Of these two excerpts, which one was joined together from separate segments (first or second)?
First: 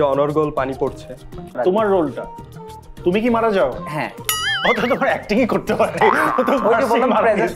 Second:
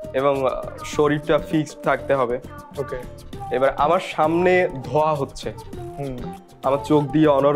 first